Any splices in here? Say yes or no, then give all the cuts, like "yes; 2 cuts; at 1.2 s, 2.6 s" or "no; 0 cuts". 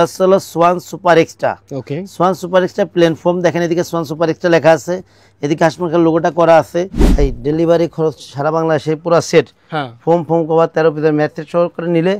yes; 1 cut; at 7.0 s